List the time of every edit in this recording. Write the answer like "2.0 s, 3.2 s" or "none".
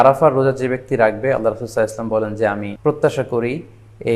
2.7 s